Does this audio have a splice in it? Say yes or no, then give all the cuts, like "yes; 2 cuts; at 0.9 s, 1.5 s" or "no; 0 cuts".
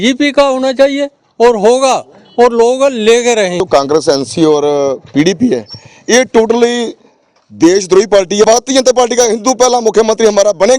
yes; 2 cuts; at 3.6 s, 8.5 s